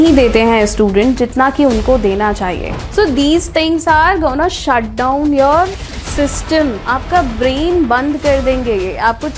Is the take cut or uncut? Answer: cut